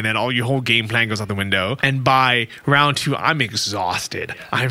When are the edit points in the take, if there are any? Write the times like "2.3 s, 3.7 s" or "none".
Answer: 1.8 s